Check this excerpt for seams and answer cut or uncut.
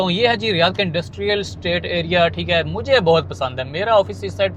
uncut